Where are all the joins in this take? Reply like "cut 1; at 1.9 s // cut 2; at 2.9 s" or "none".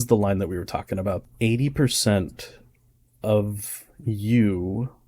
cut 1; at 1.2 s